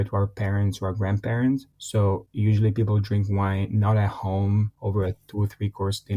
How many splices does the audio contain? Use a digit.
1